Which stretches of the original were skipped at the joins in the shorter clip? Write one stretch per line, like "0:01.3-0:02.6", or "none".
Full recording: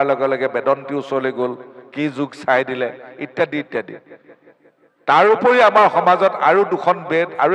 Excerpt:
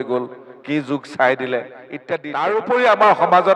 0:03.6-0:05.0

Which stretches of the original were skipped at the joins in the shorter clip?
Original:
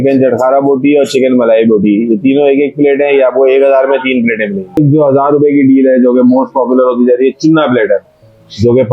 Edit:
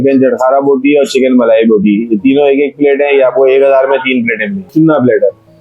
0:04.7-0:07.4

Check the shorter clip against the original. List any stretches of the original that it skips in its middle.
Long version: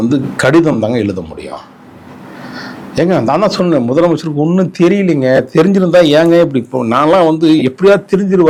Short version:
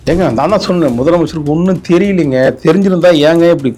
none

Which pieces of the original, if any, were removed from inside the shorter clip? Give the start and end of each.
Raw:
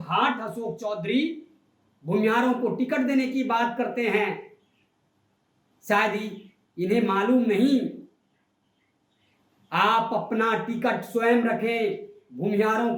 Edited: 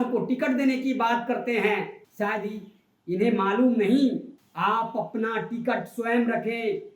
0:04.5-0:05.7
0:08.1-0:09.6

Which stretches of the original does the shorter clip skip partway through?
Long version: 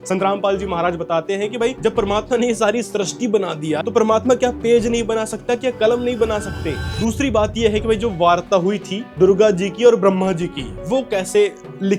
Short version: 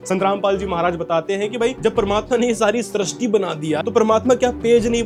none

